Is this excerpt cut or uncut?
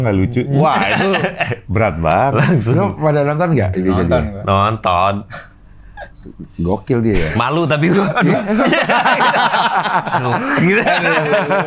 uncut